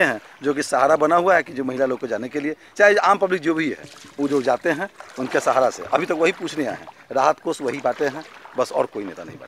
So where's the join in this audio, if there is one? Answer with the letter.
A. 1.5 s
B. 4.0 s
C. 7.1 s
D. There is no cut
D